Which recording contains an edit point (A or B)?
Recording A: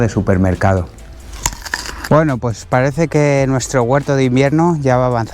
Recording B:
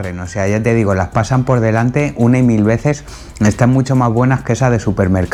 A